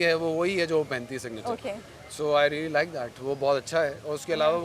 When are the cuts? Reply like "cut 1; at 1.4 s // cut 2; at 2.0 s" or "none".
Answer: none